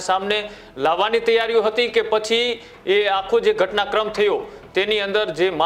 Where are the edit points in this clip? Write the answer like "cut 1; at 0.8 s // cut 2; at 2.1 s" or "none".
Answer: none

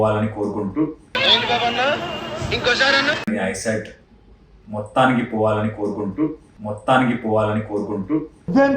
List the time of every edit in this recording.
none

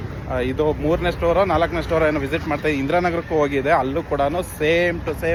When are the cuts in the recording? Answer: none

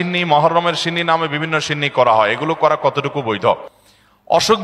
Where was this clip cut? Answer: none

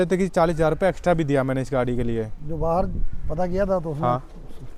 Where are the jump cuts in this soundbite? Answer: none

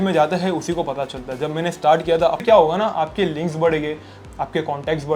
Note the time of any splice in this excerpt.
cut 1; at 2.4 s

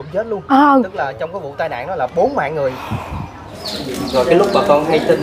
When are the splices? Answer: cut 1; at 3.6 s

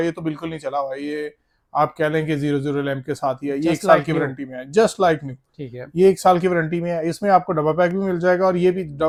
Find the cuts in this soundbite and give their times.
none

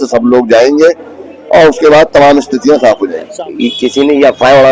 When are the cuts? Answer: cut 1; at 3.3 s

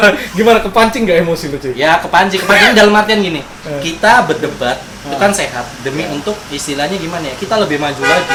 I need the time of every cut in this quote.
none

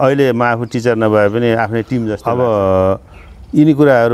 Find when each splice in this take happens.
cut 1; at 2.1 s

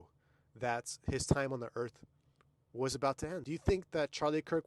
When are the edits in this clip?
cut 1; at 3.5 s

